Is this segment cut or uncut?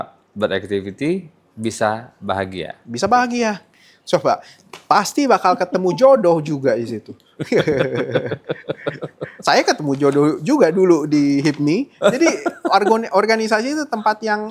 uncut